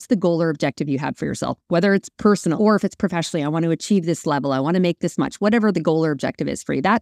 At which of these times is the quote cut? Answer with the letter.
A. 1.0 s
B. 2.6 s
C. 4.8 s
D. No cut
B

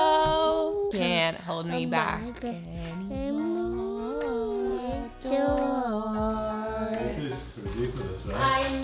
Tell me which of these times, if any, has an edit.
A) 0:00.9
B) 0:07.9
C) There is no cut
A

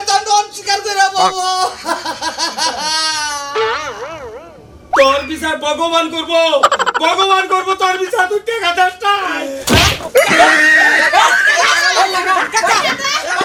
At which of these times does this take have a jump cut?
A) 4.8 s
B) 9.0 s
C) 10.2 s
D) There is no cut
D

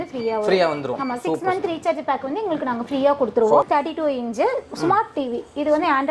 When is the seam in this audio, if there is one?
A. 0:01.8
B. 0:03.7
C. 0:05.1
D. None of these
B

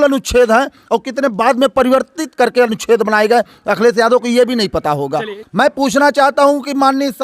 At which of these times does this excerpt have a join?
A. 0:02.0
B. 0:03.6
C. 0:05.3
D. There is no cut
C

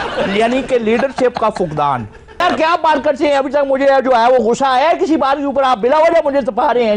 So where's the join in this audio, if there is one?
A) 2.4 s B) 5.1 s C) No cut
A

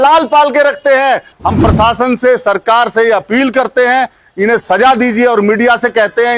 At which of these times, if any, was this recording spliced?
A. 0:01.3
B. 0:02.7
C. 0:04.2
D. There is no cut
A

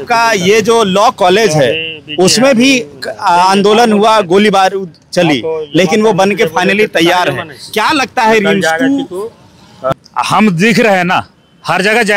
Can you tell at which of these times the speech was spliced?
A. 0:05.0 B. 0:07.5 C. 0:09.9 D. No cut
C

